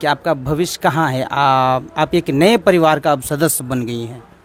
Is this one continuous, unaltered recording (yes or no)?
yes